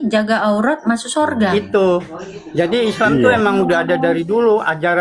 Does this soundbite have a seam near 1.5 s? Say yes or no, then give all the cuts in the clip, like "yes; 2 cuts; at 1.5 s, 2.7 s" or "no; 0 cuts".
yes; 1 cut; at 1.5 s